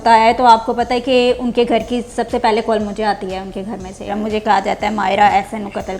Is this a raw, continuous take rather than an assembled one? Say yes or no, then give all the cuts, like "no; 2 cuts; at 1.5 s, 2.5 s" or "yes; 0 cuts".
no; 1 cut; at 4.1 s